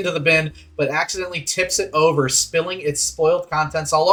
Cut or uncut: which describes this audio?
uncut